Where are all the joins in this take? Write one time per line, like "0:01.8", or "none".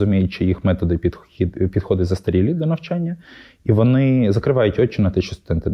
none